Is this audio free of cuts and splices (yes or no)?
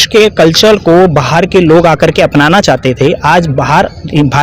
yes